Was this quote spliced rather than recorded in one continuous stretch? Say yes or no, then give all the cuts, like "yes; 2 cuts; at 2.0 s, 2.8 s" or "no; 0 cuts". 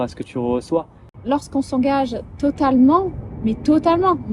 yes; 1 cut; at 1.2 s